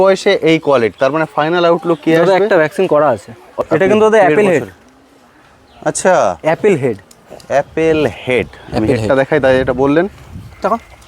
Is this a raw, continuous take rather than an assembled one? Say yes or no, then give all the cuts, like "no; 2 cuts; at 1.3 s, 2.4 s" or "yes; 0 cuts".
no; 1 cut; at 3.6 s